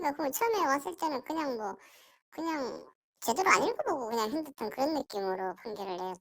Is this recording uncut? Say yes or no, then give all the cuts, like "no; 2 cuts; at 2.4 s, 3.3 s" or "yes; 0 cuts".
yes; 0 cuts